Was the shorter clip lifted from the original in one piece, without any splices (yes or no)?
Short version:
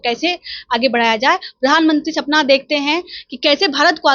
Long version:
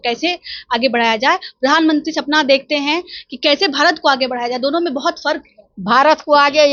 yes